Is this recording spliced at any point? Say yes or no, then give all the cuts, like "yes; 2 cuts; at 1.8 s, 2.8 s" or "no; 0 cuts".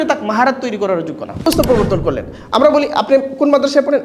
yes; 1 cut; at 1.5 s